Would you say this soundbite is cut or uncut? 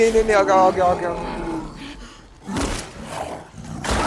uncut